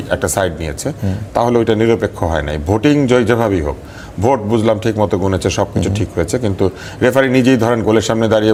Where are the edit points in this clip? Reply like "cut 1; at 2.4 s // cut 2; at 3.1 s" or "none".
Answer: none